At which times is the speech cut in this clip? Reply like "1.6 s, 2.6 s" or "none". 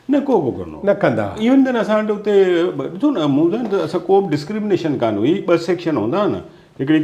none